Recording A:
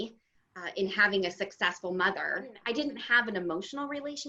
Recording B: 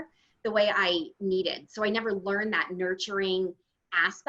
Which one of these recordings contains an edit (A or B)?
A